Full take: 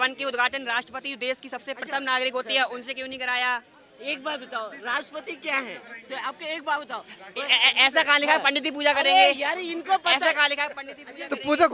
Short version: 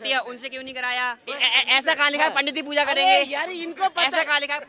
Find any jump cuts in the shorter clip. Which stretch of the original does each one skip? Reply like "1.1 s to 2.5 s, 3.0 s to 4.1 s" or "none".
3.7 s to 7.3 s

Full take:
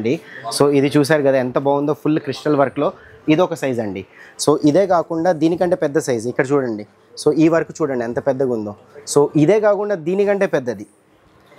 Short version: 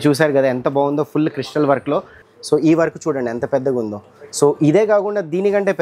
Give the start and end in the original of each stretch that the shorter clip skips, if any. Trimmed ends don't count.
3.1 s to 6.9 s

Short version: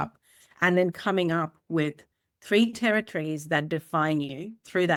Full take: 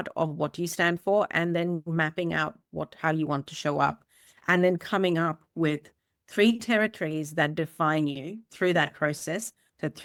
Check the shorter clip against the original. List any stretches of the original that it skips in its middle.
none

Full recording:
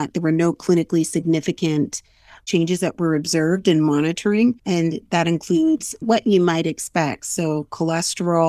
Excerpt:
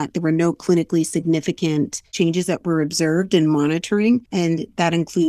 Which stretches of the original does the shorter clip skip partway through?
2.0 s to 2.3 s

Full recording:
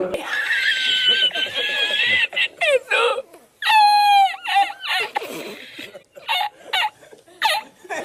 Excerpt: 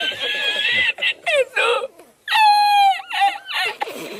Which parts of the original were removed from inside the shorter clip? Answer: none

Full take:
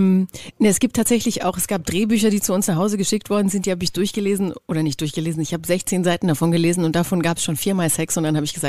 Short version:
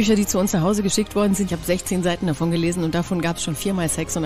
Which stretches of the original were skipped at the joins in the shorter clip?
3.6 s to 5.5 s

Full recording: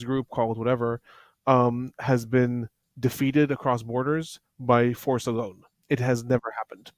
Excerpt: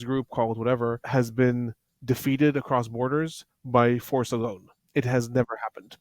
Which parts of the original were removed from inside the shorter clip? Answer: 1.0 s to 2.0 s

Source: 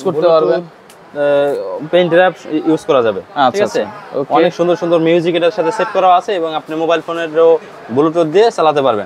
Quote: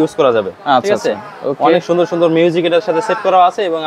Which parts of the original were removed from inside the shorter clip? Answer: none

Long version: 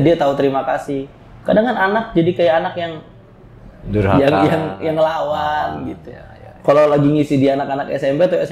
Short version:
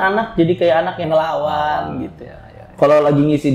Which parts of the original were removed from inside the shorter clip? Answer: 2.8 s to 4.9 s

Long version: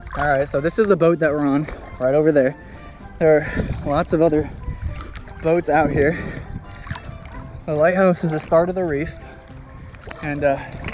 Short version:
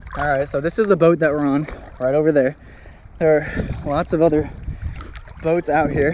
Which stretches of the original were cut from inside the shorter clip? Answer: none

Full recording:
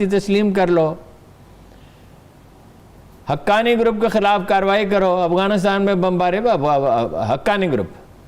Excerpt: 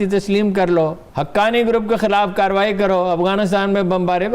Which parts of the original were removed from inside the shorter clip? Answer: 1.0 s to 3.2 s

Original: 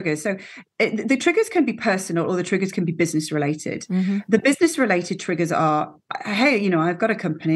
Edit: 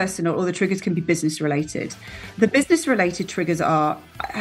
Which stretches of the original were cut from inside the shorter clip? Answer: none

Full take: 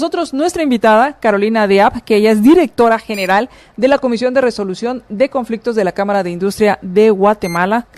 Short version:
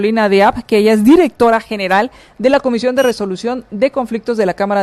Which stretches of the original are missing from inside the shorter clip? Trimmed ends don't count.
none

